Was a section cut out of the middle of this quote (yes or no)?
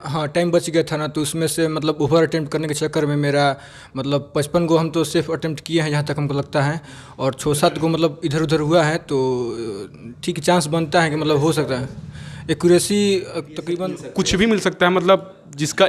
yes